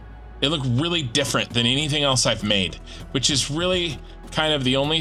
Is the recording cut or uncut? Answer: uncut